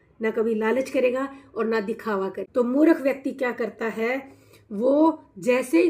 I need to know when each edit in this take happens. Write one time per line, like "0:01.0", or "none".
0:02.4